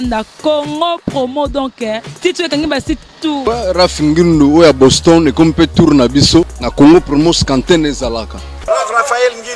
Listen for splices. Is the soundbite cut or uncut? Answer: cut